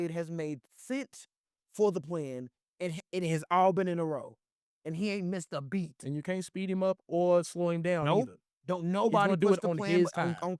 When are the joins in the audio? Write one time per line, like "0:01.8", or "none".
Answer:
none